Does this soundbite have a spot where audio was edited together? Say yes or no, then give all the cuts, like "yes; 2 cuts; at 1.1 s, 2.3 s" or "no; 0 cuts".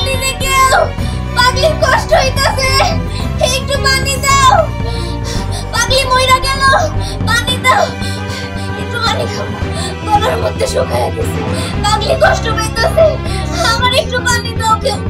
no; 0 cuts